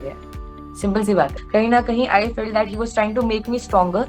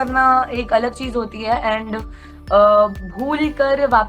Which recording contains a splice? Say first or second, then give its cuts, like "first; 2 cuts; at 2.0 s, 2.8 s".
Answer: first; 1 cut; at 1.4 s